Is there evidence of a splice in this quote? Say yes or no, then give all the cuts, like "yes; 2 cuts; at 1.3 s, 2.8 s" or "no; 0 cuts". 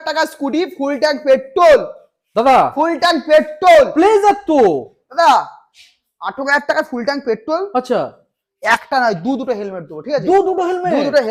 no; 0 cuts